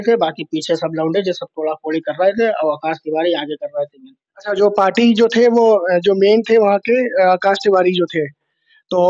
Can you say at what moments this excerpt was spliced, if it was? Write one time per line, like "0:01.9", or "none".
none